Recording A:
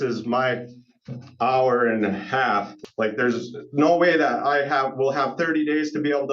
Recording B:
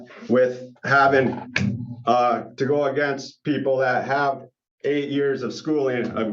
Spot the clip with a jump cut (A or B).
A